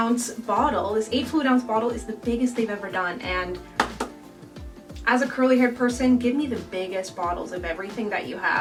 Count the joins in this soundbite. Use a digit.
0